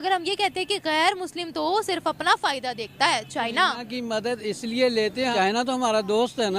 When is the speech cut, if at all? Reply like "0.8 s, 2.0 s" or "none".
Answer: 5.3 s